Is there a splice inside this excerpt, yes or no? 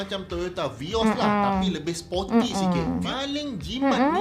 yes